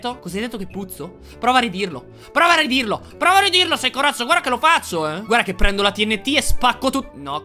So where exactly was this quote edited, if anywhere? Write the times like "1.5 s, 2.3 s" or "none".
none